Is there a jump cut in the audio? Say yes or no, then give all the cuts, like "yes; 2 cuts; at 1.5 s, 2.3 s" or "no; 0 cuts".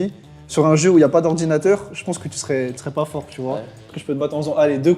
yes; 1 cut; at 3.8 s